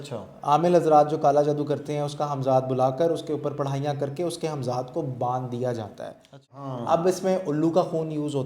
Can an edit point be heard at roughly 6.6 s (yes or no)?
yes